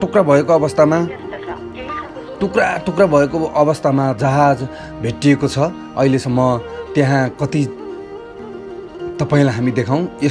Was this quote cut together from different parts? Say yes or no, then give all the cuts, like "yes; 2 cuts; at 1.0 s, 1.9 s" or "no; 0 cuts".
yes; 2 cuts; at 7.7 s, 9.2 s